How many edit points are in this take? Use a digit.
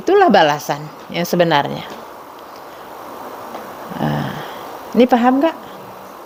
0